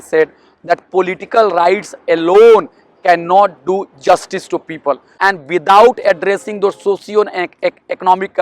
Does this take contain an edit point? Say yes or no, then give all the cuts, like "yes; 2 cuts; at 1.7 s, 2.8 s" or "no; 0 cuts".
yes; 1 cut; at 5.1 s